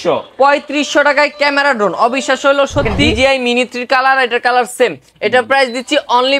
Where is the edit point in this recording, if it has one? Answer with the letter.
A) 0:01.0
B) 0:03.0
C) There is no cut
B